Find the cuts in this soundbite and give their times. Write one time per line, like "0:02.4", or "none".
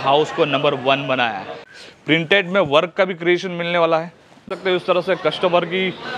0:01.6
0:04.4

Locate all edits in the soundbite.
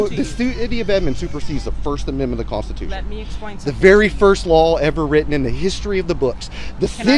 none

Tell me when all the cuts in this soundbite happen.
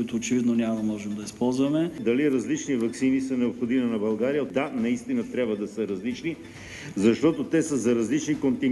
0:01.9
0:04.5

